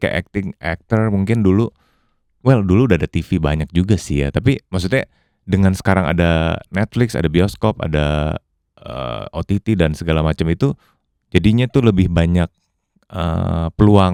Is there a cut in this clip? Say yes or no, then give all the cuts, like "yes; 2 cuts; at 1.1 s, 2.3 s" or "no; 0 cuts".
no; 0 cuts